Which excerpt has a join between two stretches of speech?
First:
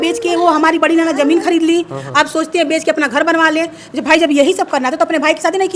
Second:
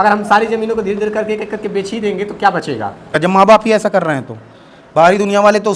second; 1 cut; at 3.1 s

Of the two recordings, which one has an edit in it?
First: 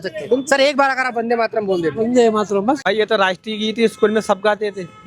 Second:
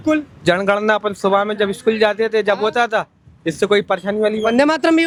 first; 1 cut; at 2.8 s

